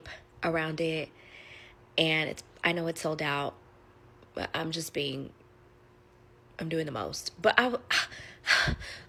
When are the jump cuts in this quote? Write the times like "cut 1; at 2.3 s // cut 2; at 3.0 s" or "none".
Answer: none